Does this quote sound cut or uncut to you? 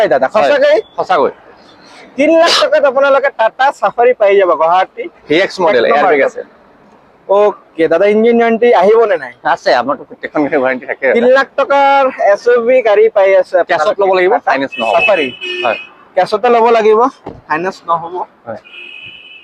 uncut